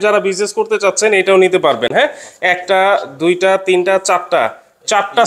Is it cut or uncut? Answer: uncut